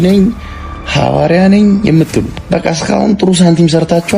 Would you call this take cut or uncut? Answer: cut